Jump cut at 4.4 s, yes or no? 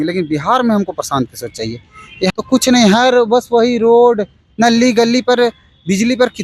no